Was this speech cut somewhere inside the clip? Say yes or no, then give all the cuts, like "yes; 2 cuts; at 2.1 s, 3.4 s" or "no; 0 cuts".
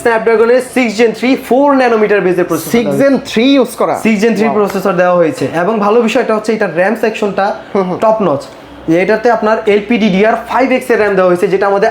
no; 0 cuts